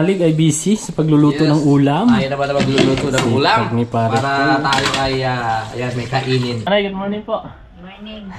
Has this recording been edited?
yes; 1 cut; at 6.7 s

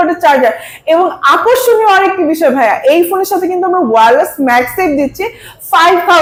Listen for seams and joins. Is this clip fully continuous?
yes; 0 cuts

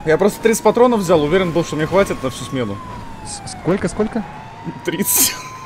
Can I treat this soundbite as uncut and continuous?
yes; 0 cuts

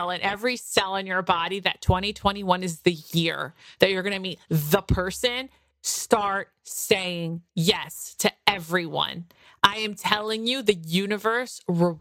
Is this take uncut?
yes; 0 cuts

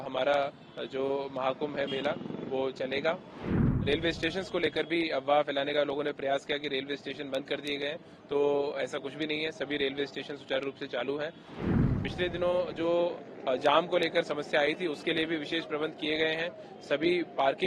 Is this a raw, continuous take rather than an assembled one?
no; 2 cuts; at 3.8 s, 11.6 s

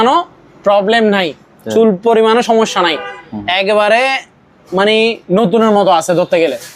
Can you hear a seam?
no; 0 cuts

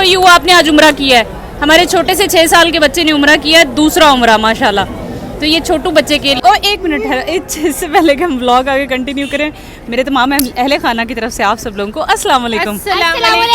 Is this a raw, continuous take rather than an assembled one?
no; 1 cut; at 6.4 s

